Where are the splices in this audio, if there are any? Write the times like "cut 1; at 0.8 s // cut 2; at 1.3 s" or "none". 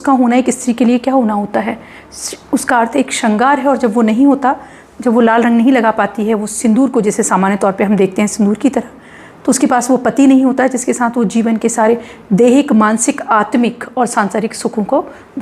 none